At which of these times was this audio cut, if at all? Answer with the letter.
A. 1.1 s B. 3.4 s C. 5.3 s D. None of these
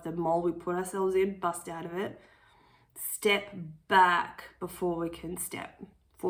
D